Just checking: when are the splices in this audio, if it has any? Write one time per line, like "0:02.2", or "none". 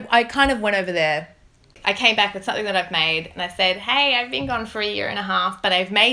0:01.8

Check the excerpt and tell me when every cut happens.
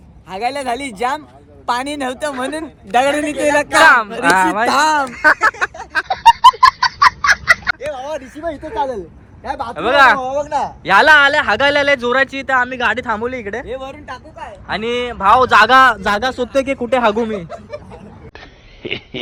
none

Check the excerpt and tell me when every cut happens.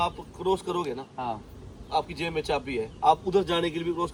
none

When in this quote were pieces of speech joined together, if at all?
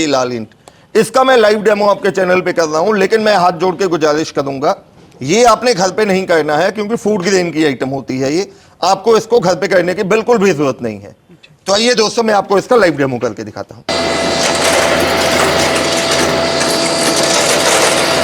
0:13.9

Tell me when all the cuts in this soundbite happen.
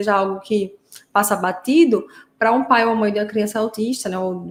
none

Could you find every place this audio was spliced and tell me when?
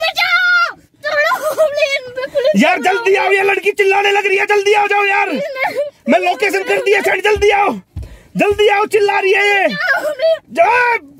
none

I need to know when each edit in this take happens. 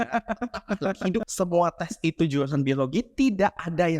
0:01.3

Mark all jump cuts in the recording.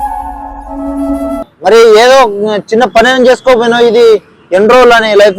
0:01.5

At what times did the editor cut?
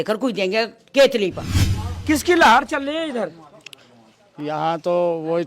0:01.9

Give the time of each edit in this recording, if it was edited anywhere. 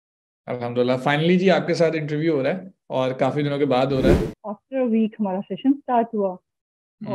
0:04.3

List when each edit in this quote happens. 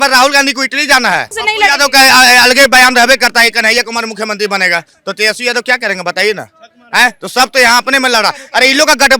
0:01.4

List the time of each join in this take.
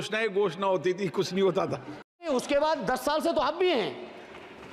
0:02.3

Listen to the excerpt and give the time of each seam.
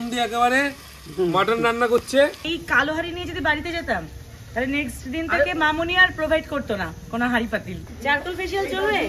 0:02.4
0:07.8

